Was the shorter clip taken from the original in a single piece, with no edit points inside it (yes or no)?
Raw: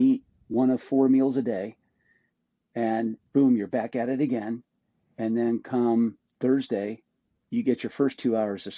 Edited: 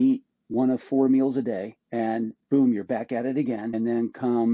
no